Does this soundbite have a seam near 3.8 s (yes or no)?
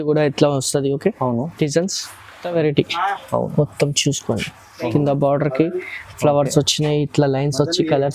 no